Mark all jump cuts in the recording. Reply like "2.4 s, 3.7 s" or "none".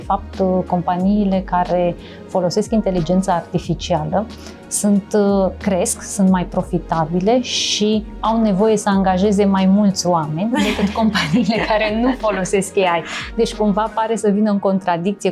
none